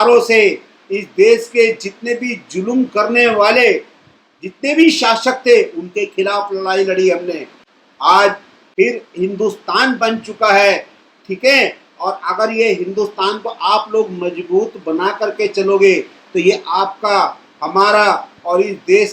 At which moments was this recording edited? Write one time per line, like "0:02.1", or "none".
none

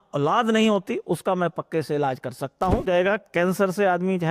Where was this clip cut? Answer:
0:02.9

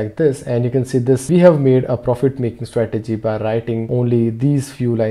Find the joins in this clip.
0:01.2
0:03.8

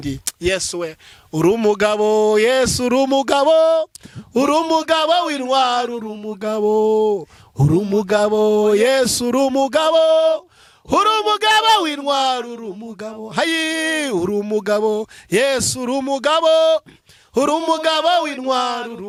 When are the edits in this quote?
none

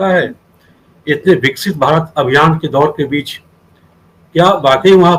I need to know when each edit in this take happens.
none

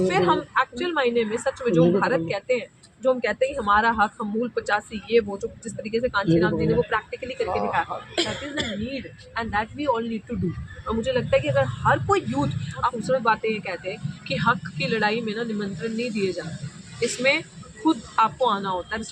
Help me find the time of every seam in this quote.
0:12.8

